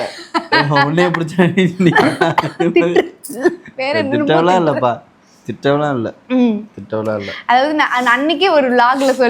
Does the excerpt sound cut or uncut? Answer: uncut